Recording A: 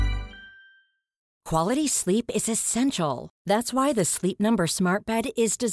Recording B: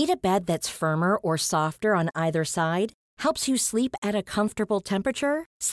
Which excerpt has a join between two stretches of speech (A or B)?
A